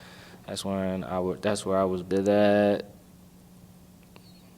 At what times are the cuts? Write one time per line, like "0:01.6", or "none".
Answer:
0:02.0